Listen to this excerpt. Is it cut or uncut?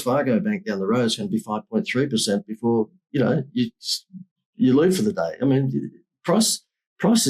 uncut